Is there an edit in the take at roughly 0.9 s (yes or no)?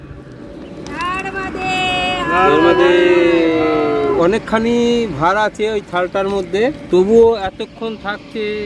yes